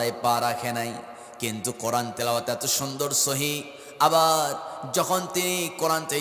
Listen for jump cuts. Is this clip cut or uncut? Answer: uncut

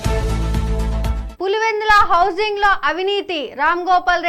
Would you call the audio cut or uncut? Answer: cut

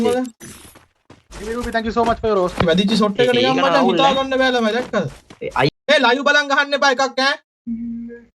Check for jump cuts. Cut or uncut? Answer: cut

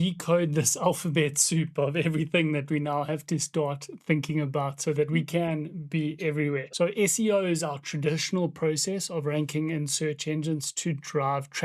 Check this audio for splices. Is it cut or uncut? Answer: cut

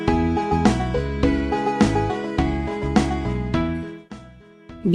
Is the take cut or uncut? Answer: cut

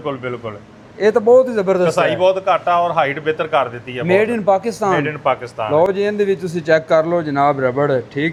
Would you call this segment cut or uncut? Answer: uncut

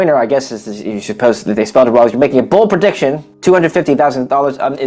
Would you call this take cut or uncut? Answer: cut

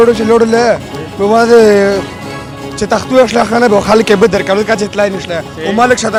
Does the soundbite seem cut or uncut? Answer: uncut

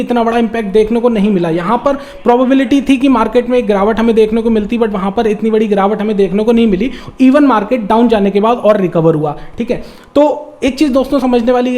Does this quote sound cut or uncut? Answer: uncut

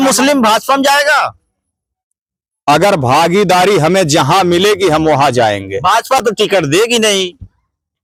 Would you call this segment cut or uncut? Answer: uncut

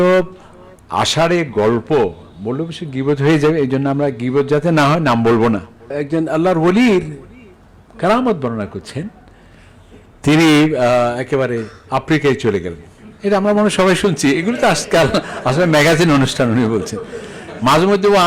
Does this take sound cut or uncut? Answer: cut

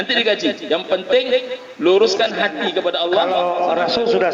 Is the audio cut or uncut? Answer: cut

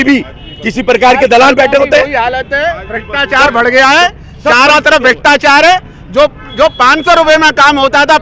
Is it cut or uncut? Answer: uncut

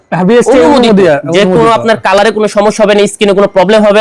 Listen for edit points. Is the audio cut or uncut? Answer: uncut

